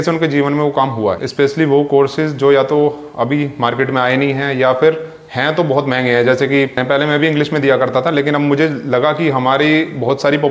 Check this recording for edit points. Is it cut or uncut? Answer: cut